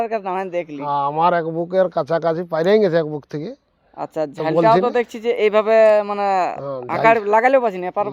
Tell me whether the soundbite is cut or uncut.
uncut